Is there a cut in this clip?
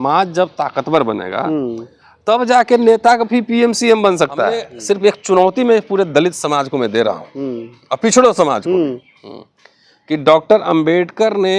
yes; 1 cut; at 4.7 s

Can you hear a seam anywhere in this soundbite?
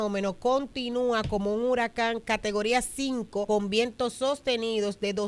yes; 2 cuts; at 2.2 s, 3.5 s

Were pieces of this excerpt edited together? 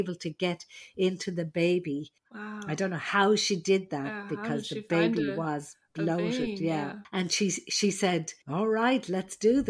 yes; 1 cut; at 8.4 s

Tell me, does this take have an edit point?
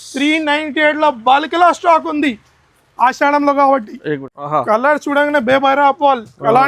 yes; 1 cut; at 4.3 s

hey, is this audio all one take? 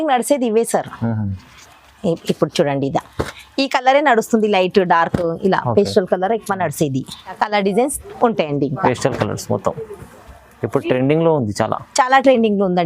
no; 1 cut; at 7.4 s

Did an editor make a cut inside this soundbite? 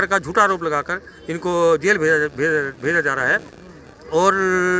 no; 0 cuts

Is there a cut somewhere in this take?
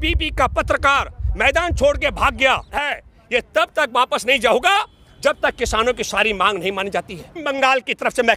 yes; 2 cuts; at 2.8 s, 7.4 s

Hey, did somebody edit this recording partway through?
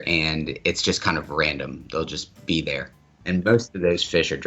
yes; 1 cut; at 3.0 s

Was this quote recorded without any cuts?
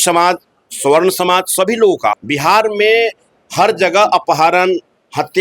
no; 1 cut; at 2.1 s

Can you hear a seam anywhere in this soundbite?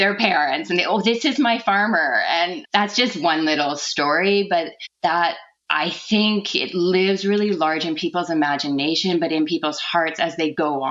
yes; 1 cut; at 2.6 s

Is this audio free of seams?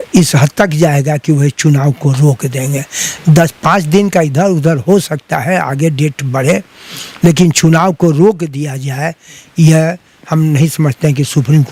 yes; 0 cuts

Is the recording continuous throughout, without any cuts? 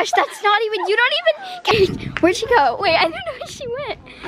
no; 1 cut; at 1.7 s

